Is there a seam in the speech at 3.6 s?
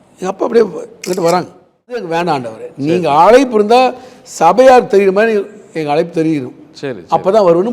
no; 1 cut; at 2.0 s

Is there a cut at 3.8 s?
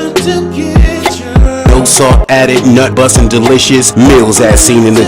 no; 0 cuts

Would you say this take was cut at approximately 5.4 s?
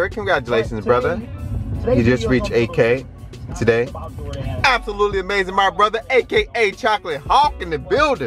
no; 0 cuts

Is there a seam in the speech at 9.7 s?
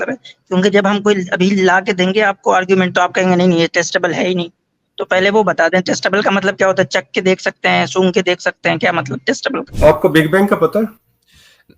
yes; 1 cut; at 9.7 s

